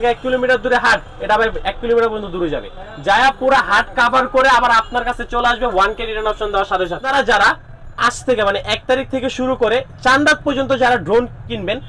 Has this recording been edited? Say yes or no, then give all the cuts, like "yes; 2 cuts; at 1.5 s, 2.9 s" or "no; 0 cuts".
yes; 1 cut; at 7.0 s